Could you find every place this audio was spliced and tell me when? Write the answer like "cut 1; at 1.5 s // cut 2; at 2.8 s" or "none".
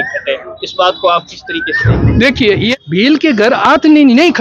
cut 1; at 2.7 s